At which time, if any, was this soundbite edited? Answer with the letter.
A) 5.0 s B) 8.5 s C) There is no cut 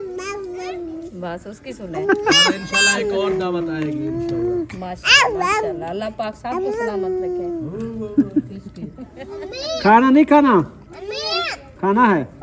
A